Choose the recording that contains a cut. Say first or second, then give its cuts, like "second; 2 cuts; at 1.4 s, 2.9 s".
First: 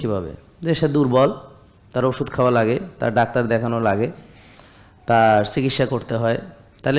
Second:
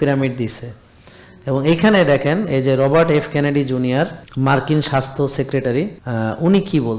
second; 2 cuts; at 4.2 s, 6.0 s